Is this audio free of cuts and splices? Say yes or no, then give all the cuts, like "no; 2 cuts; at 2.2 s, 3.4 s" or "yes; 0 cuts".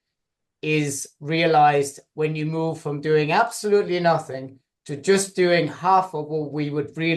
yes; 0 cuts